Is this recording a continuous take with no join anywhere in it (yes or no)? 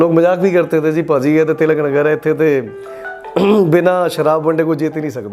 yes